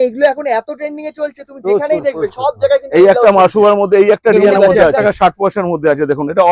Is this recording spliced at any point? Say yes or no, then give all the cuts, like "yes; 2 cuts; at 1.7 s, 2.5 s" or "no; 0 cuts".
yes; 1 cut; at 5.0 s